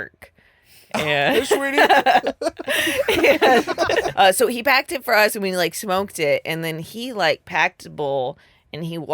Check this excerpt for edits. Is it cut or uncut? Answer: cut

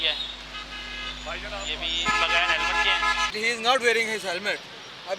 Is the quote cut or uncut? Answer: cut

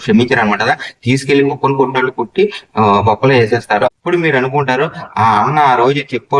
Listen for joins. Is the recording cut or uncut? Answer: cut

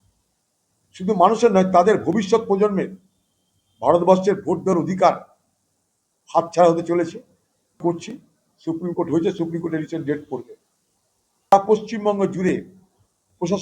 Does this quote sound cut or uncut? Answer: cut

